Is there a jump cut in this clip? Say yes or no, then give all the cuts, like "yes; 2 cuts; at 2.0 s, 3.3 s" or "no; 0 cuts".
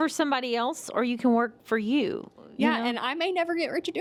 no; 0 cuts